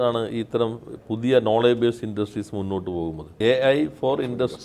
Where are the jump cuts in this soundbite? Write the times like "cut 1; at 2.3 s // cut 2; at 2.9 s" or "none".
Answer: cut 1; at 3.3 s